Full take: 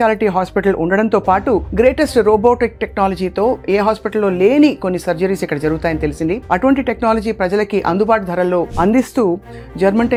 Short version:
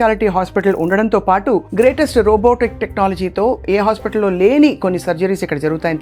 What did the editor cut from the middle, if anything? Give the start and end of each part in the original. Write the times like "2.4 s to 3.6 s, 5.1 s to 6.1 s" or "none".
none